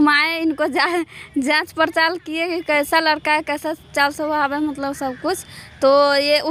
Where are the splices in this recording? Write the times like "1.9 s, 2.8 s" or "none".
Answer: none